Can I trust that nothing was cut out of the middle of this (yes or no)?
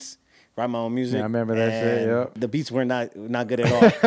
no